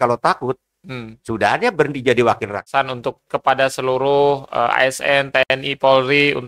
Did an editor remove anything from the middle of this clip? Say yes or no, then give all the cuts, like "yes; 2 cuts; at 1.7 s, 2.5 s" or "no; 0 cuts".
yes; 1 cut; at 2.6 s